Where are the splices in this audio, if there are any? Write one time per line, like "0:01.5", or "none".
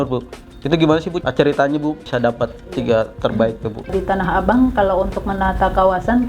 0:01.2
0:02.0
0:03.9